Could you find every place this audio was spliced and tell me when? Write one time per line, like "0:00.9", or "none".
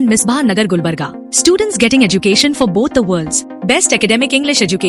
none